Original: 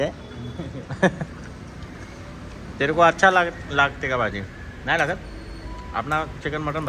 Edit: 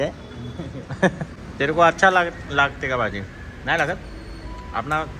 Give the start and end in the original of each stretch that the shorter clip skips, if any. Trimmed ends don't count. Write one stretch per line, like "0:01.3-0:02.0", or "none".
0:01.4-0:02.6